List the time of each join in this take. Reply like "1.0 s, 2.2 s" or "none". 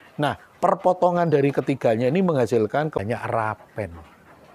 3.0 s